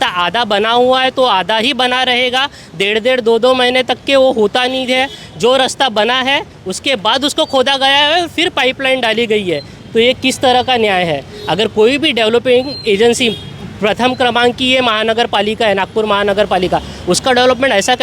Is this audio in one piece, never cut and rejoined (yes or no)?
yes